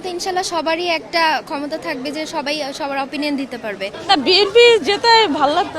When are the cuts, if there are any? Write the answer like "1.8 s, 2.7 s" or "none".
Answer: 3.9 s